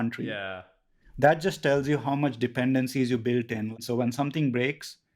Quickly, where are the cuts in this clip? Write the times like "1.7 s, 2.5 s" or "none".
3.8 s